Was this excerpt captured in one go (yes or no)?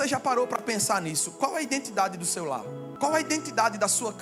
no